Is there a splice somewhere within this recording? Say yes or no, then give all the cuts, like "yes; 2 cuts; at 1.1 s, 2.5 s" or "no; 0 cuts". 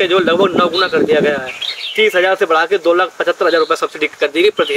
no; 0 cuts